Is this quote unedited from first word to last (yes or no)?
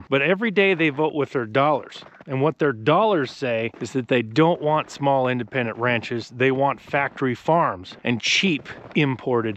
no